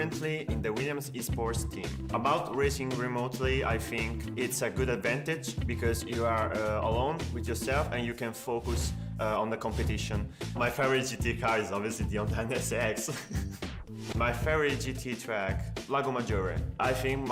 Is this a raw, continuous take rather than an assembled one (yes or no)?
yes